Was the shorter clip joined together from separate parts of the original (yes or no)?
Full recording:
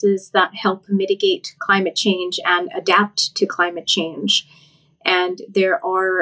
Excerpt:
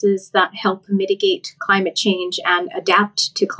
no